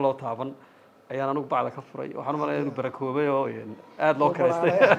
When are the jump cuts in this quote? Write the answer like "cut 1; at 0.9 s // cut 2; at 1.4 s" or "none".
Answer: none